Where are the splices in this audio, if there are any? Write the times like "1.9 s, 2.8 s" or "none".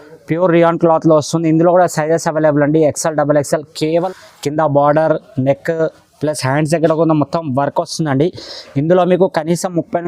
4.1 s